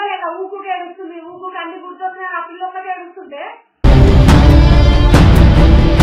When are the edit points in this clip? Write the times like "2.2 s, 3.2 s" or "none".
none